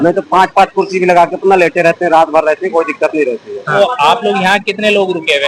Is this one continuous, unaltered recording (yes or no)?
no